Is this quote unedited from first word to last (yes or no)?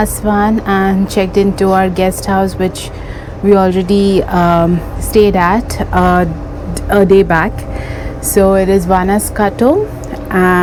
yes